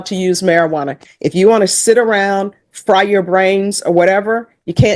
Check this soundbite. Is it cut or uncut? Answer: uncut